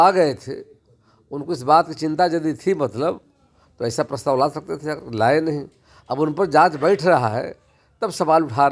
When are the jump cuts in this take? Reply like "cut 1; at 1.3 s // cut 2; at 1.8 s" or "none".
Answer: none